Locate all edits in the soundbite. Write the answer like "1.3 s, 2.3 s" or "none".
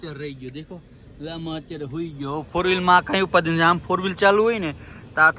none